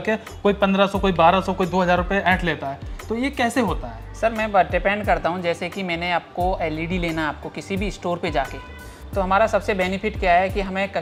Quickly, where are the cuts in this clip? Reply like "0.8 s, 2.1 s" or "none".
none